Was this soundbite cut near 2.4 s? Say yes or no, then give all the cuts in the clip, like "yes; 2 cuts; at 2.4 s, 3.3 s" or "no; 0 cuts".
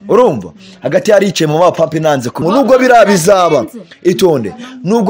yes; 1 cut; at 2.4 s